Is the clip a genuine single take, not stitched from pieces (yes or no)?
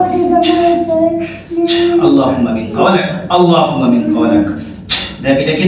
yes